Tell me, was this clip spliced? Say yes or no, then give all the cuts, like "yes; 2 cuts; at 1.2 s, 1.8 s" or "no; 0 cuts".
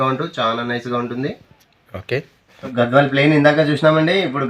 yes; 1 cut; at 2.4 s